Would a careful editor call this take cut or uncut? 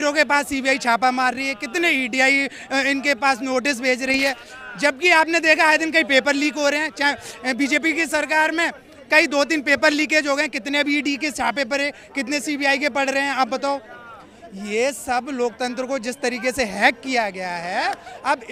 uncut